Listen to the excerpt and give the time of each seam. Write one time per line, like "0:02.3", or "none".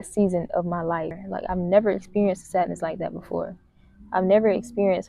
0:01.2